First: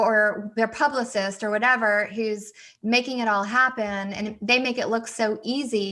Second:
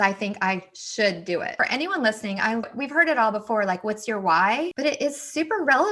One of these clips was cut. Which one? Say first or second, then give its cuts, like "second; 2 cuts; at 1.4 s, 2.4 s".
second; 3 cuts; at 1.5 s, 2.7 s, 4.7 s